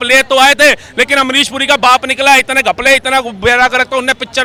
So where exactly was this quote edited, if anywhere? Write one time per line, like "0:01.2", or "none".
none